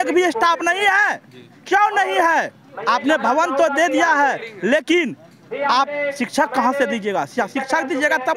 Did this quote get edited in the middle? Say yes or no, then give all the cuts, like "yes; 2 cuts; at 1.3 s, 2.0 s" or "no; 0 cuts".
no; 0 cuts